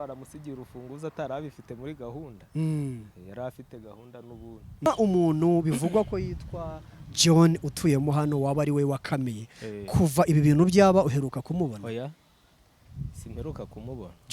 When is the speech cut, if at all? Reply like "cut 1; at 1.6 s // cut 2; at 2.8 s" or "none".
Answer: cut 1; at 4.9 s

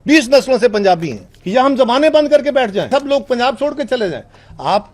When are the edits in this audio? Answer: cut 1; at 1.3 s // cut 2; at 2.9 s

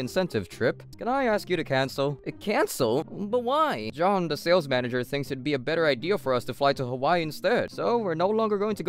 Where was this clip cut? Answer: cut 1; at 0.9 s // cut 2; at 7.7 s

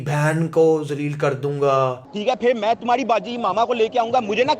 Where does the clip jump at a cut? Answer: none

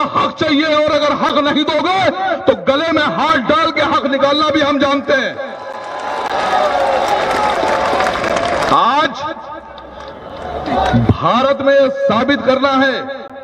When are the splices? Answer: none

